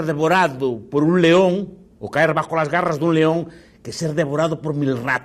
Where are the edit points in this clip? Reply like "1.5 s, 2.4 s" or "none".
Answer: none